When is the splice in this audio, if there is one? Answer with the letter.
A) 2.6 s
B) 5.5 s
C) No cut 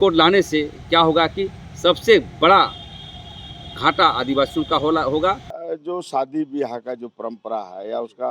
B